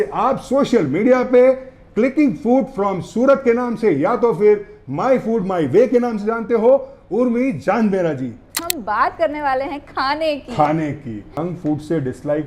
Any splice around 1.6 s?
no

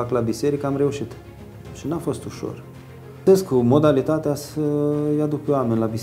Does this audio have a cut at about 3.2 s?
yes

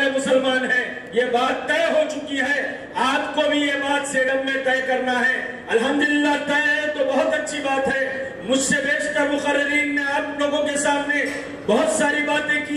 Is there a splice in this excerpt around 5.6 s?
no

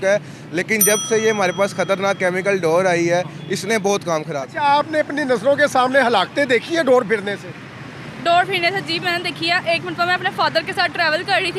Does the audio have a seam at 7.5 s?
no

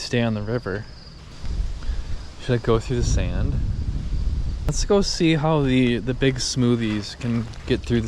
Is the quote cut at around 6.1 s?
no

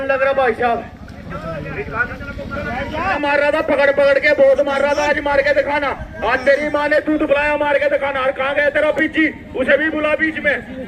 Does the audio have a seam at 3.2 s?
yes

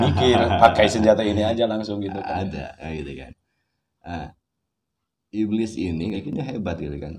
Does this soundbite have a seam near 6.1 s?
yes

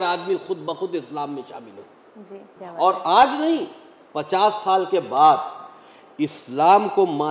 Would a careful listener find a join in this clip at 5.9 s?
no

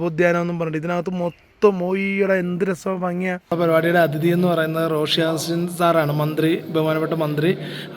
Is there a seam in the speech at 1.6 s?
no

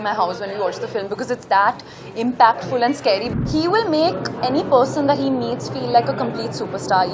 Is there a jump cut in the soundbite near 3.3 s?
yes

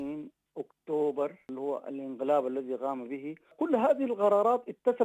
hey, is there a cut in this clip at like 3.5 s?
yes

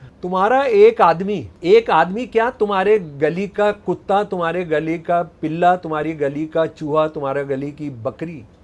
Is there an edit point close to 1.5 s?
yes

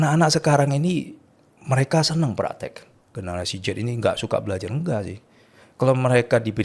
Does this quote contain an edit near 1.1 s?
no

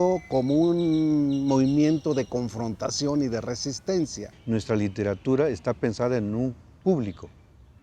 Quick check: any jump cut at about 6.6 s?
no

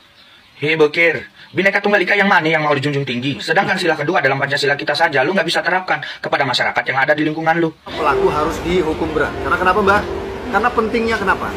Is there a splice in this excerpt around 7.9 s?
yes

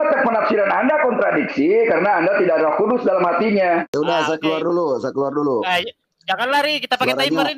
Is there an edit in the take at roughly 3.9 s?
yes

